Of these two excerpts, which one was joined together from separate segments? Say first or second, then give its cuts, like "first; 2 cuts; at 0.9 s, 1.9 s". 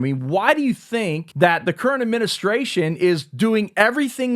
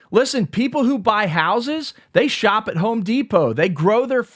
first; 1 cut; at 1.2 s